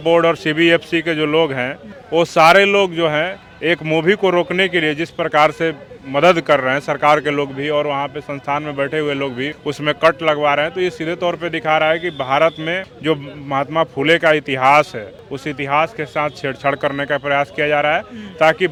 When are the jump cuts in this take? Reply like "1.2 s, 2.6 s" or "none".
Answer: none

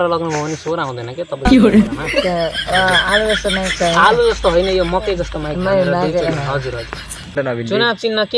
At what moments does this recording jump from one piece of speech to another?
7.3 s

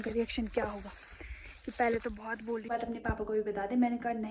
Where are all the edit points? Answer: 2.7 s

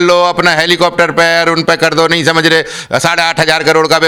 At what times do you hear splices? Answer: none

